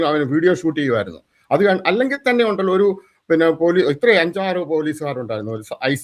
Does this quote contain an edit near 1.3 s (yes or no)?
no